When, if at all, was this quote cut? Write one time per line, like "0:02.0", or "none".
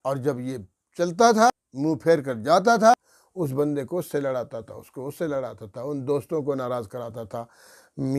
0:01.5
0:02.9